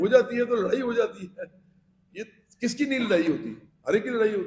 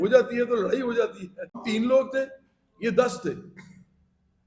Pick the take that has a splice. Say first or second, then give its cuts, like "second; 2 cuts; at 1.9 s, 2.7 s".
second; 1 cut; at 1.6 s